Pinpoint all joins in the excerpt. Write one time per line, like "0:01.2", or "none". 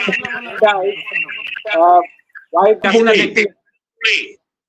0:02.8